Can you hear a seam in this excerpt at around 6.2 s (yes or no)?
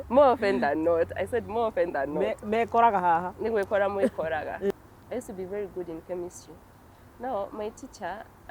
no